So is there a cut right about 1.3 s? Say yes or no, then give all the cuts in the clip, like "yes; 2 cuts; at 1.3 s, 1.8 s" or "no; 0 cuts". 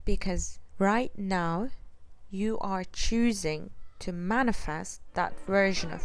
no; 0 cuts